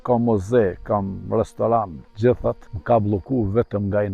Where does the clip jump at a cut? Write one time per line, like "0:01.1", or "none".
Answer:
0:02.0
0:02.7